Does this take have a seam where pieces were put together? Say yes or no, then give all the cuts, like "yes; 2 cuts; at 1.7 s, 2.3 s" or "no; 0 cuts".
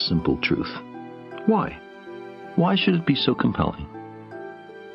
yes; 1 cut; at 3.0 s